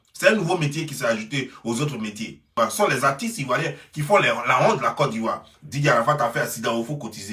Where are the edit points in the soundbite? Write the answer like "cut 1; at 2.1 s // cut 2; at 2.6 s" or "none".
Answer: cut 1; at 2.7 s

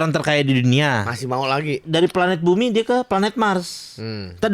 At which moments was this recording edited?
cut 1; at 1.8 s

